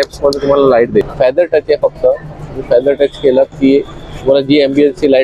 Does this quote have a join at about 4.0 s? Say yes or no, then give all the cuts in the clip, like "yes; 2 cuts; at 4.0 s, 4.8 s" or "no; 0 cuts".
no; 1 cut; at 1.0 s